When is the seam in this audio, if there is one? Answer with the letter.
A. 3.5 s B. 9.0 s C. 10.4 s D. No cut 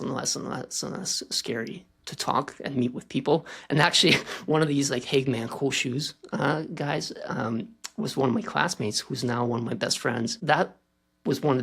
C